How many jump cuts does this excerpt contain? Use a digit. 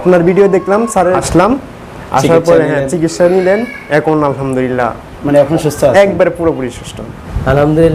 2